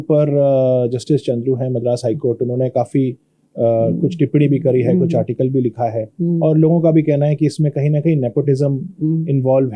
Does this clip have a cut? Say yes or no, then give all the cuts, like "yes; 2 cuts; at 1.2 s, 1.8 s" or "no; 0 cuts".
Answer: no; 0 cuts